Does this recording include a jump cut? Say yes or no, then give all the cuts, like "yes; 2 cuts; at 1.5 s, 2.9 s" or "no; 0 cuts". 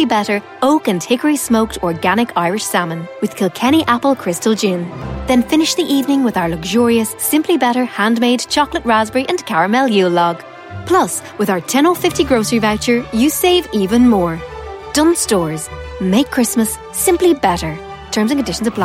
no; 0 cuts